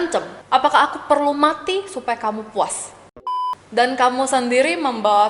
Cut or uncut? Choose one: cut